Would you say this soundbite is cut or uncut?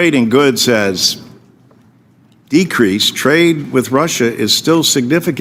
uncut